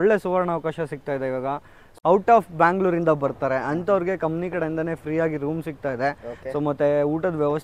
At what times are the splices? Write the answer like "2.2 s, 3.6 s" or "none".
1.9 s